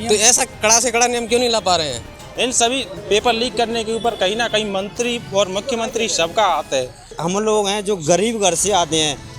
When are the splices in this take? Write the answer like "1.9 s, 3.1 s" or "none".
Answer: 2.1 s, 7.1 s